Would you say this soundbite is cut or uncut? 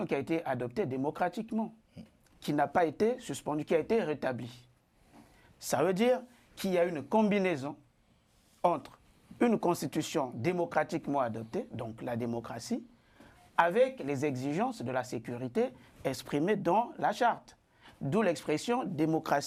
uncut